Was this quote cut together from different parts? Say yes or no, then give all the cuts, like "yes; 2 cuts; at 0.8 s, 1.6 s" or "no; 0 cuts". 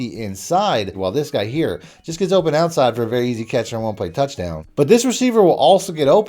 yes; 2 cuts; at 0.9 s, 4.6 s